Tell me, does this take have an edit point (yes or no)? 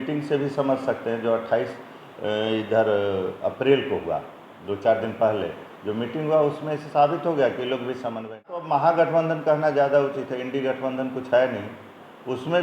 yes